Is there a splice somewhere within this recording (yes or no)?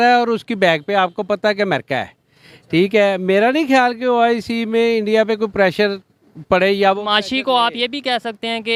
no